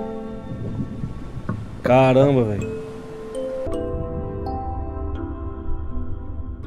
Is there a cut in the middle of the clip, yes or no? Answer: yes